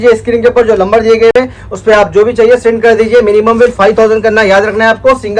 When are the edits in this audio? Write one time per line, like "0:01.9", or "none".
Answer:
none

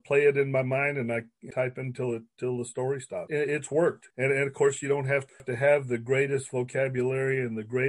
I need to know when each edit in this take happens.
0:04.1

